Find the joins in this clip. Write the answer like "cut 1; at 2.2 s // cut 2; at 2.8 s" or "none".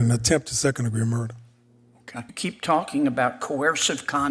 cut 1; at 2.3 s